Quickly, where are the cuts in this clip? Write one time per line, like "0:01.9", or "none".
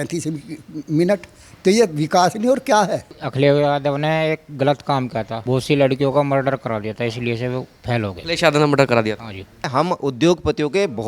0:03.2
0:09.7